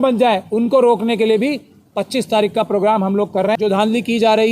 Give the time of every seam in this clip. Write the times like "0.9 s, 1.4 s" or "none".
3.6 s